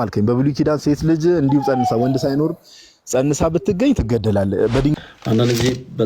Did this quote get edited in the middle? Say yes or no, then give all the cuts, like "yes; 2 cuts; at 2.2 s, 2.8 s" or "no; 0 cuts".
yes; 1 cut; at 5.0 s